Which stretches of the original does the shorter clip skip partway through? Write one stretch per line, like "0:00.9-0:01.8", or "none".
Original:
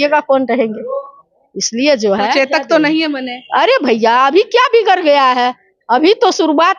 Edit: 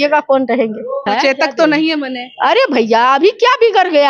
0:01.1-0:02.2